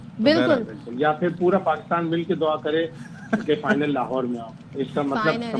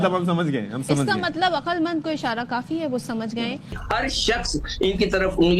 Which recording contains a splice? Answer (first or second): second